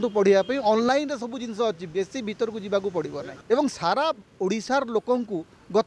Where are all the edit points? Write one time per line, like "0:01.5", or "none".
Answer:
0:03.3